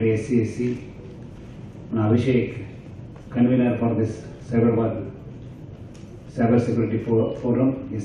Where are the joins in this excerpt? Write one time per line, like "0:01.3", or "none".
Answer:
none